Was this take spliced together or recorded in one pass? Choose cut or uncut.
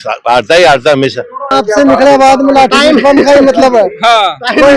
cut